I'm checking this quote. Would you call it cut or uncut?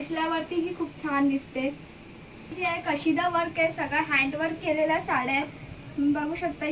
cut